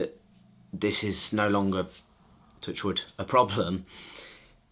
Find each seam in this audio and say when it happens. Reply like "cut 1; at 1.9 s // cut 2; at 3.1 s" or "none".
none